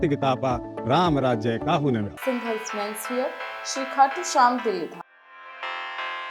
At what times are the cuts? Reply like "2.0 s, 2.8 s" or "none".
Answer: 5.0 s